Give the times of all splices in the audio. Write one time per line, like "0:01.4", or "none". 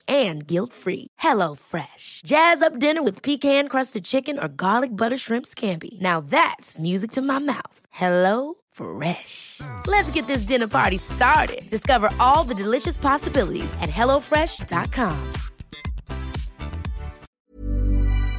0:17.1